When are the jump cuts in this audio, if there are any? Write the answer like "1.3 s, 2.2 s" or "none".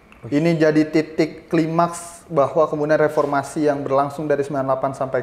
none

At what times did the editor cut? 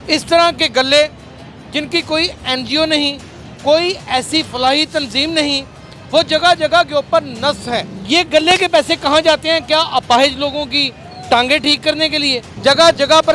7.9 s, 12.4 s

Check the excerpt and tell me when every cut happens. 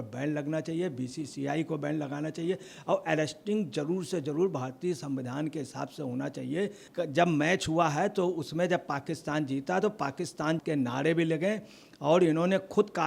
6.8 s

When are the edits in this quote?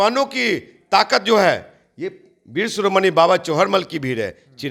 none

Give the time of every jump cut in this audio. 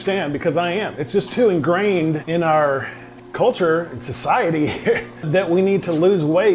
2.2 s, 5.3 s

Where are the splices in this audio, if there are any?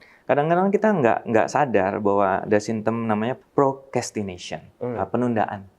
3.4 s

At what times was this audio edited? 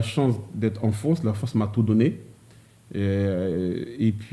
none

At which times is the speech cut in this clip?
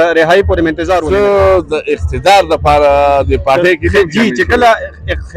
1.0 s

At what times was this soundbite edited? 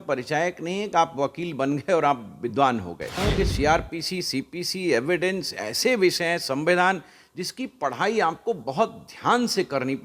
3.2 s

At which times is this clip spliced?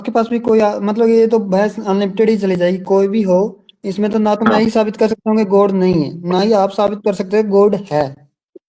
none

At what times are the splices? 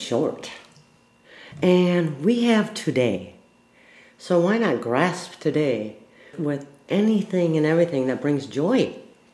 6.3 s

